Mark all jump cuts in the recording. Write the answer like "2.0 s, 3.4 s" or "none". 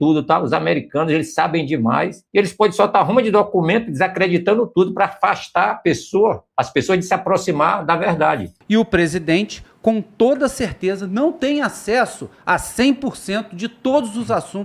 2.2 s, 8.5 s